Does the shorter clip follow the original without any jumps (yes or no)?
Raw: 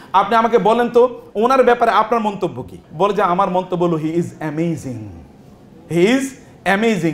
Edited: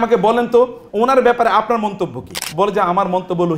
yes